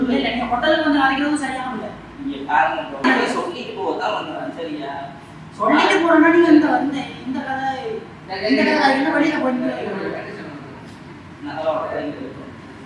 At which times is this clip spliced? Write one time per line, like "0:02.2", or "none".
0:03.0